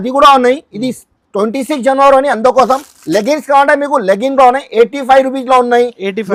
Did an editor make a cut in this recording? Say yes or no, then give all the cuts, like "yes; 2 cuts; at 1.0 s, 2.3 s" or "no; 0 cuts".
no; 0 cuts